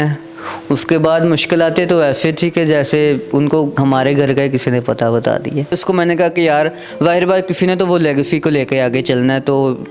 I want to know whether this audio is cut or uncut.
cut